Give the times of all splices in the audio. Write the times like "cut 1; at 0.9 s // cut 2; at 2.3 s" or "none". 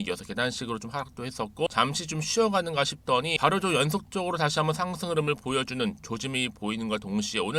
cut 1; at 1.7 s // cut 2; at 3.3 s